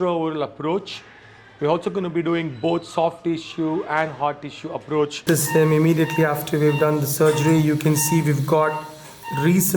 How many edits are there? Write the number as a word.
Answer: one